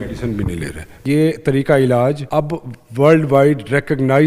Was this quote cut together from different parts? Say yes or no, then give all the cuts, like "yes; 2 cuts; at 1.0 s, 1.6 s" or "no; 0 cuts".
yes; 2 cuts; at 1.0 s, 2.2 s